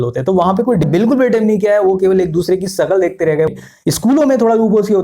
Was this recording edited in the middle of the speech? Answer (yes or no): yes